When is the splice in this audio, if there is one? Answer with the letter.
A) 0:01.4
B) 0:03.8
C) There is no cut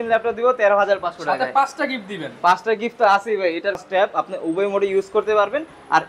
B